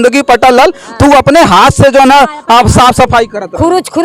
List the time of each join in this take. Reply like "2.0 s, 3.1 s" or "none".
none